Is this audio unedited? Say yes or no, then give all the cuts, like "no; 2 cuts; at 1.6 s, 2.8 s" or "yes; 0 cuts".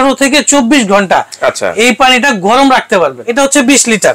no; 1 cut; at 3.2 s